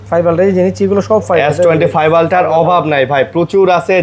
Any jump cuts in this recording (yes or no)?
no